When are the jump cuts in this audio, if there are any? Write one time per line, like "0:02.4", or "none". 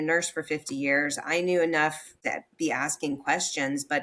0:02.1